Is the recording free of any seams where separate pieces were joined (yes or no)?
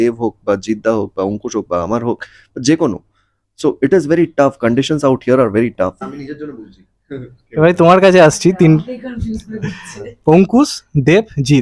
no